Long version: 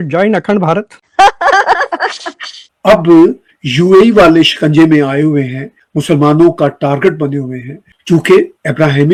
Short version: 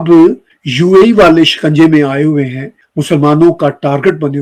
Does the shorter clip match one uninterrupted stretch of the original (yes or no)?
yes